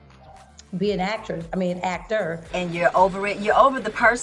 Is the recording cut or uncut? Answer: cut